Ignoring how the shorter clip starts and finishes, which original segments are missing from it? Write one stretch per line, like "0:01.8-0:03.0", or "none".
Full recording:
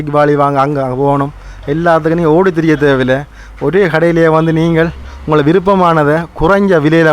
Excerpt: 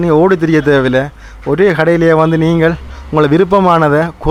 none